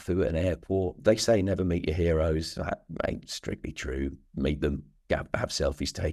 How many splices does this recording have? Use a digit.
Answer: 1